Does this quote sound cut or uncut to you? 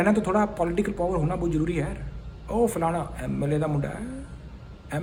uncut